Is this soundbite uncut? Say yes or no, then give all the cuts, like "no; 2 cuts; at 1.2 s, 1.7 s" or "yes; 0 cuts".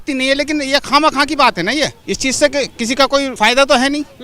no; 2 cuts; at 2.0 s, 3.3 s